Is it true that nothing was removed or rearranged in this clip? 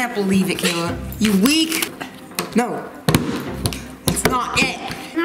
no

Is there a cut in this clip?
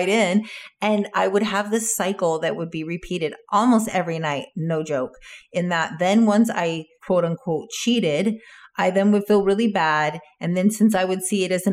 yes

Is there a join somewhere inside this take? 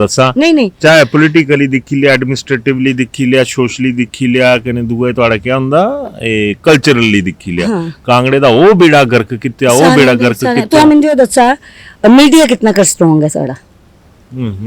no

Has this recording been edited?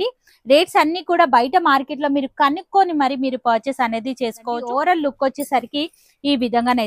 yes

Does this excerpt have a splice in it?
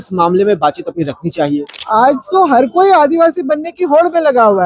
yes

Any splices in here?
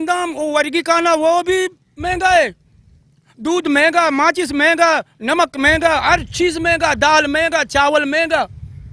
no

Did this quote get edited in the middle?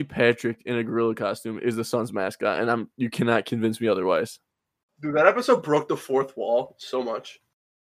no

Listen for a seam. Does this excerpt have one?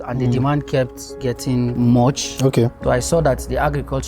yes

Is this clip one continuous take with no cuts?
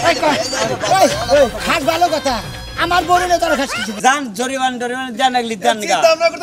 no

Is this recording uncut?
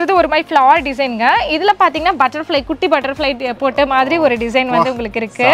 yes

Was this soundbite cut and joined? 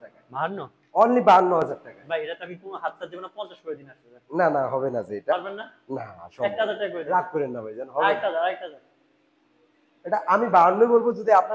no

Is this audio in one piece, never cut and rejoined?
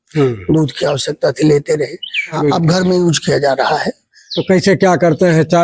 no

